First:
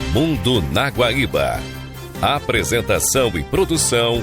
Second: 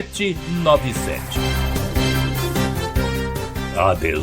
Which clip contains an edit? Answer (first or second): second